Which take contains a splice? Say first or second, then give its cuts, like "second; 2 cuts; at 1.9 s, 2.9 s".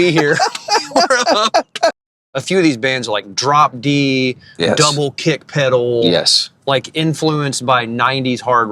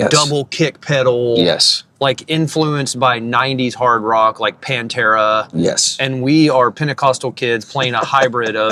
first; 1 cut; at 2.0 s